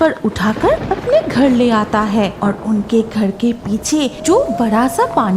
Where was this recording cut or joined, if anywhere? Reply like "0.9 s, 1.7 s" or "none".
0.9 s, 2.3 s, 4.2 s